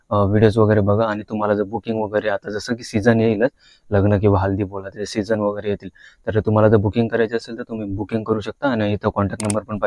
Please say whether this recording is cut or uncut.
uncut